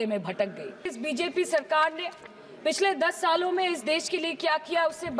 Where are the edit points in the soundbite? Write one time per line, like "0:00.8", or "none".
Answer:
0:00.9